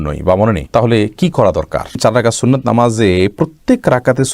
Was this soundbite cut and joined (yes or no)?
yes